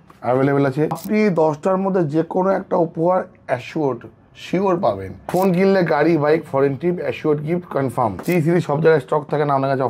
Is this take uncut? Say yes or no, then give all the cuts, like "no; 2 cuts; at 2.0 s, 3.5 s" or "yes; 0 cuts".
no; 3 cuts; at 1.0 s, 5.1 s, 8.2 s